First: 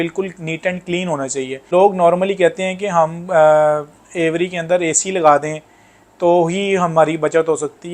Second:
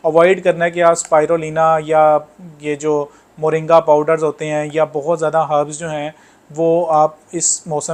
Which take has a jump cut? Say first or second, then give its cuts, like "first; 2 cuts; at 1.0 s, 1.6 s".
first; 1 cut; at 1.6 s